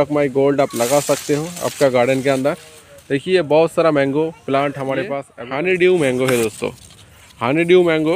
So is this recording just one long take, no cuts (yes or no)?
no